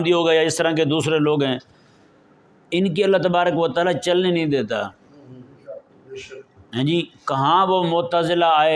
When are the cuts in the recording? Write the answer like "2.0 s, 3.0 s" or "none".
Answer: none